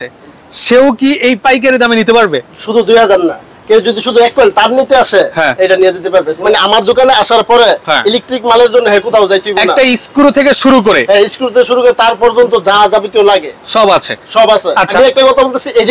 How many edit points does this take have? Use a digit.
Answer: 2